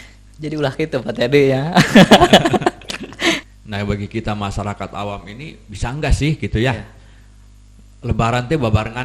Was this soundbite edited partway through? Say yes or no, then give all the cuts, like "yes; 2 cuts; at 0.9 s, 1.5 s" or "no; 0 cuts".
yes; 1 cut; at 3.4 s